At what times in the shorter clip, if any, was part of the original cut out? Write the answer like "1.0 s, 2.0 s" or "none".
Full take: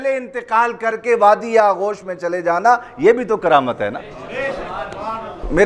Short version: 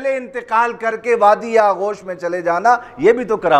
none